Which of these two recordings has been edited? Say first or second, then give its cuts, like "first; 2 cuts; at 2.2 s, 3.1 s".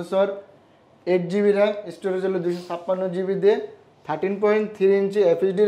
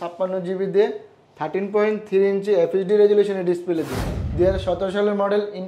second; 1 cut; at 4.2 s